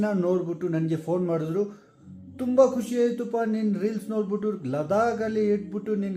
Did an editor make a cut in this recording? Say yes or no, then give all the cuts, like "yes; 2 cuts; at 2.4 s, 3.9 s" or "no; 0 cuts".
no; 0 cuts